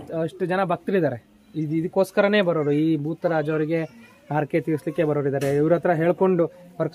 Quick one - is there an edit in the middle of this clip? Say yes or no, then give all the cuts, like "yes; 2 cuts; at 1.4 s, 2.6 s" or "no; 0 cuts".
no; 0 cuts